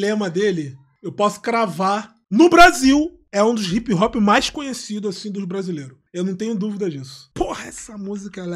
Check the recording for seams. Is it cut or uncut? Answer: uncut